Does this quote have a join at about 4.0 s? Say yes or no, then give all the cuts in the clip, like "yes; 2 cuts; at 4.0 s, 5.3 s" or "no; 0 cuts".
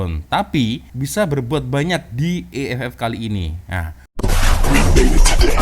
yes; 1 cut; at 4.0 s